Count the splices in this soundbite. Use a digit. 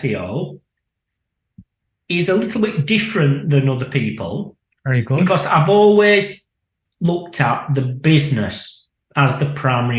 1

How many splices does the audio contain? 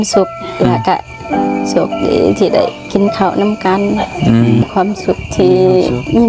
1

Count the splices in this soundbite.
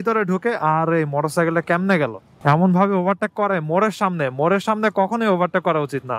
0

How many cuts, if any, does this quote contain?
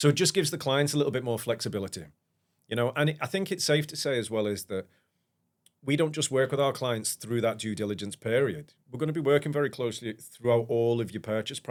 0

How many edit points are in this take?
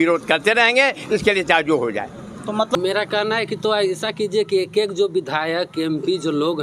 1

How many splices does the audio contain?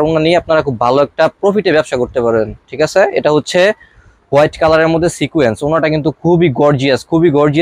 0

